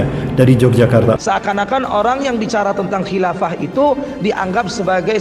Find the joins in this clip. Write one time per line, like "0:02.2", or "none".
0:01.2